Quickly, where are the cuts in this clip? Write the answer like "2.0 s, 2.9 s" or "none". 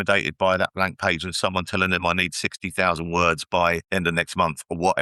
3.8 s